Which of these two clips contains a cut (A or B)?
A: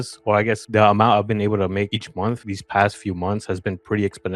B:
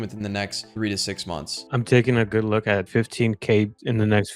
B